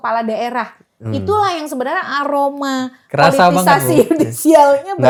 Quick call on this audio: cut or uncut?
uncut